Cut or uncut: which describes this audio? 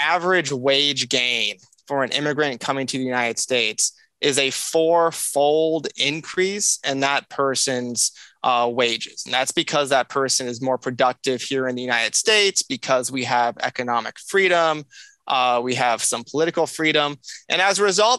uncut